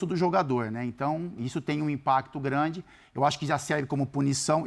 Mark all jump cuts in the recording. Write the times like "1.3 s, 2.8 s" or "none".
none